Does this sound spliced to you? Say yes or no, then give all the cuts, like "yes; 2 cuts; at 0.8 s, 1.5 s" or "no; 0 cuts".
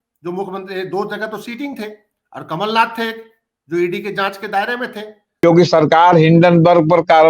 yes; 1 cut; at 5.2 s